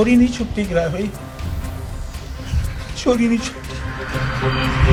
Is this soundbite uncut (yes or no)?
yes